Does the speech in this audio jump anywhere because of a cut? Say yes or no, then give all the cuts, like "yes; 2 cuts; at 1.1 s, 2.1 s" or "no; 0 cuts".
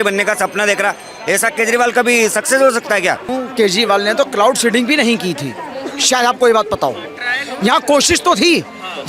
yes; 1 cut; at 3.3 s